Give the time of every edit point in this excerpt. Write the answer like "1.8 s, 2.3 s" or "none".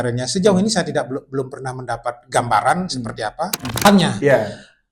3.8 s